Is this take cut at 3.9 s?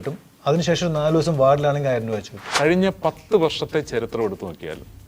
no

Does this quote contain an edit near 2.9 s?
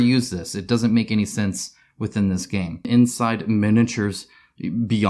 yes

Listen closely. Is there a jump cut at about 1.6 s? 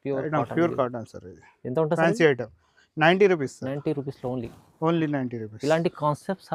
no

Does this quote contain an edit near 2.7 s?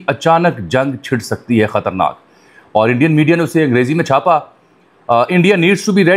no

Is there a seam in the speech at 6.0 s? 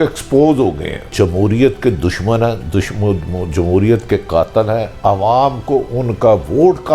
no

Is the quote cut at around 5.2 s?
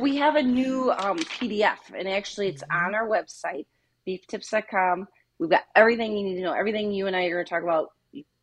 yes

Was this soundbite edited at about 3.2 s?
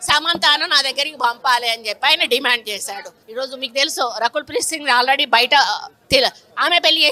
yes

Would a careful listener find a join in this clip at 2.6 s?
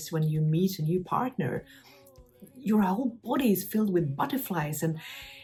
no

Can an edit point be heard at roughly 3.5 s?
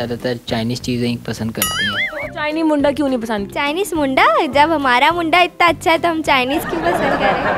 yes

